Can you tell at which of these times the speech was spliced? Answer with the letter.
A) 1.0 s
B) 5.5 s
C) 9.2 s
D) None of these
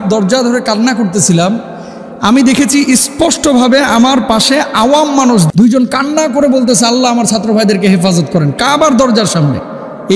B